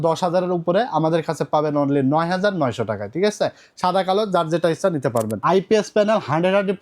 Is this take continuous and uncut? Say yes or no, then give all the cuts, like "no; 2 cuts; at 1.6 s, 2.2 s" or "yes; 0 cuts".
no; 1 cut; at 5.3 s